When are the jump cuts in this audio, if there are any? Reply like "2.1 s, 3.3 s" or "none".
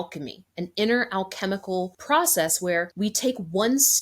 2.0 s, 2.9 s